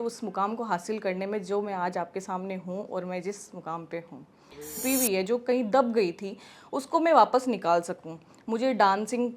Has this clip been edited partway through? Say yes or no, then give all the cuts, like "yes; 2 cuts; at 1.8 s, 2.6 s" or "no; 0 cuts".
yes; 1 cut; at 4.7 s